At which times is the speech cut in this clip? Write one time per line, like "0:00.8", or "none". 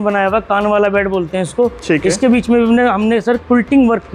none